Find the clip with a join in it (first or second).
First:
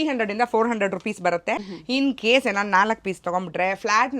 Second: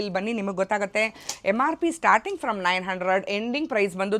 first